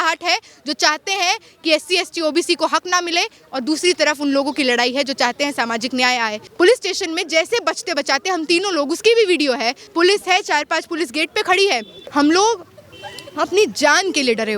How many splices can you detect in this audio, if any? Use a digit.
3